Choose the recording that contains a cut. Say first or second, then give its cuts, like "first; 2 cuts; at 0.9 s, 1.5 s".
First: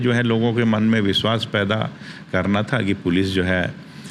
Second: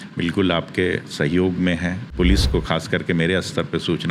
second; 1 cut; at 2.1 s